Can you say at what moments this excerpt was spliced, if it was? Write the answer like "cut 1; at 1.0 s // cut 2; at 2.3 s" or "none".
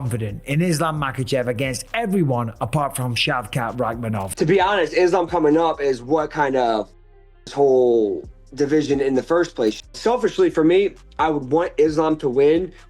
cut 1; at 4.3 s // cut 2; at 9.8 s